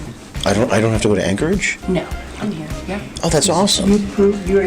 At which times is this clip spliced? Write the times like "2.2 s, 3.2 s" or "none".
2.3 s